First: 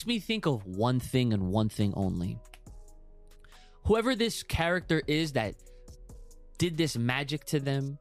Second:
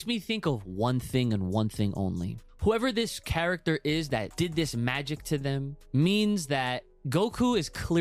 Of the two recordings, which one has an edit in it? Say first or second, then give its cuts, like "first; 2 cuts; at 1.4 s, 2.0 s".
second; 4 cuts; at 2.4 s, 4.3 s, 5.8 s, 6.9 s